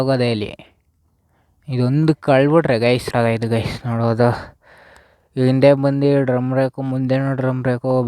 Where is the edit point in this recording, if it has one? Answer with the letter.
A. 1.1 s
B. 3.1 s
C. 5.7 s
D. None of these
B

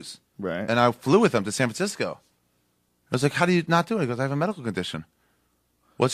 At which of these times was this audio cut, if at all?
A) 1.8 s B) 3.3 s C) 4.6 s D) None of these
C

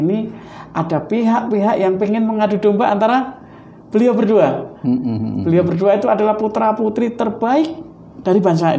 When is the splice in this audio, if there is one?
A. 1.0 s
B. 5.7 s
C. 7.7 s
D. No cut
D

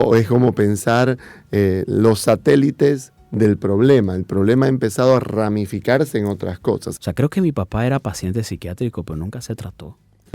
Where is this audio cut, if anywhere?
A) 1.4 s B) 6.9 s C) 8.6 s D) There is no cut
B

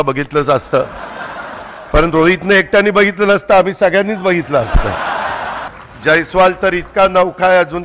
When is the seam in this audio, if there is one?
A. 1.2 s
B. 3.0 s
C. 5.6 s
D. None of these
C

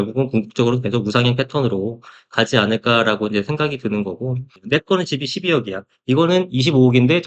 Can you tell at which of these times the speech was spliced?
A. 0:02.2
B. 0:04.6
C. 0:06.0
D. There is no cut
B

